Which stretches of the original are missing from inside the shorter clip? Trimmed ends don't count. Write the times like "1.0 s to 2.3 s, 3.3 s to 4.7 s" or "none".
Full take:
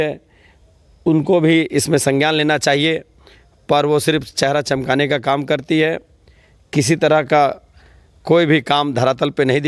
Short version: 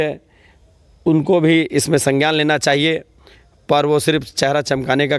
none